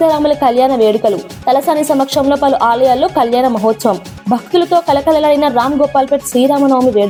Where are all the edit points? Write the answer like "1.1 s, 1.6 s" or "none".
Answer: none